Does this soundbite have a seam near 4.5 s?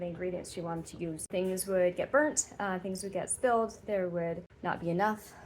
yes; 2 cuts; at 1.3 s, 4.5 s

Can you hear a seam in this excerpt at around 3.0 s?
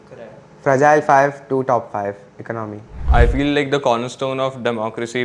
yes; 1 cut; at 3.0 s

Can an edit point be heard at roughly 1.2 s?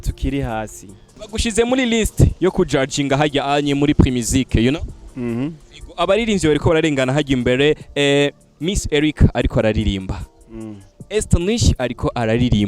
yes; 1 cut; at 1.2 s

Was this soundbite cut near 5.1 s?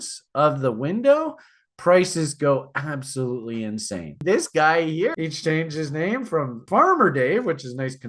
yes; 3 cuts; at 4.2 s, 5.1 s, 6.6 s

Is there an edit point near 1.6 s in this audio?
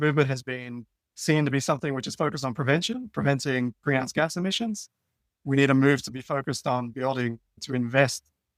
no; 1 cut; at 7.5 s

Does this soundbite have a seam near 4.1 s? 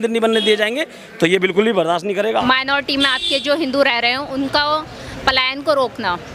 no; 1 cut; at 2.4 s

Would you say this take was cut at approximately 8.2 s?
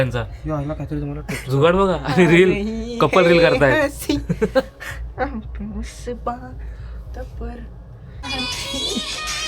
yes; 1 cut; at 8.2 s

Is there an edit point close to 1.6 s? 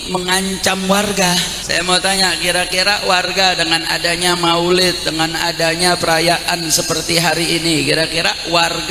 yes; 1 cut; at 1.6 s

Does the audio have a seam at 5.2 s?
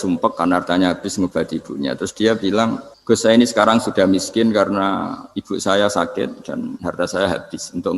no; 1 cut; at 2.9 s

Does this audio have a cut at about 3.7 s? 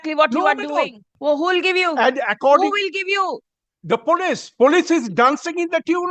no; 1 cut; at 1.1 s

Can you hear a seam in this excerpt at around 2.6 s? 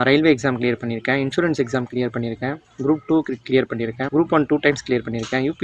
no; 1 cut; at 4.0 s

